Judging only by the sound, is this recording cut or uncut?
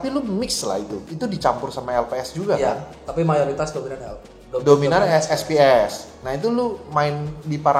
uncut